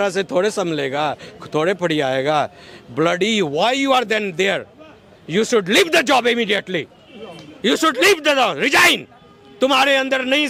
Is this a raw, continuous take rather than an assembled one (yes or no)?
yes